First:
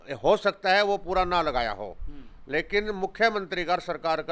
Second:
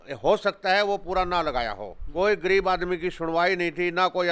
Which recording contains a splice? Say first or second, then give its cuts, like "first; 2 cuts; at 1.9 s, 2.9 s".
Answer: second; 1 cut; at 2.0 s